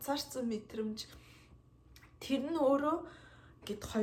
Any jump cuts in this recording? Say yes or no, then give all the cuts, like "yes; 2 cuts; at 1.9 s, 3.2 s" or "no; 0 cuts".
no; 0 cuts